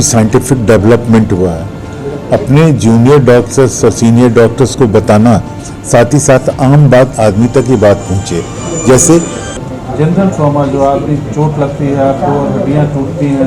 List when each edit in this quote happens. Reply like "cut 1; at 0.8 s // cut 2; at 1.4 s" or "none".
cut 1; at 9.4 s